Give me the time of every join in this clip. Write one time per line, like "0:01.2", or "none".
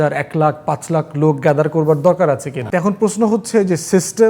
0:02.5